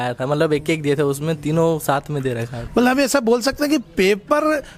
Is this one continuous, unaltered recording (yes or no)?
yes